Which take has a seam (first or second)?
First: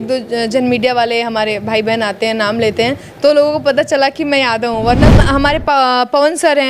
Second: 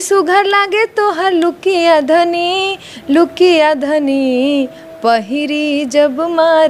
first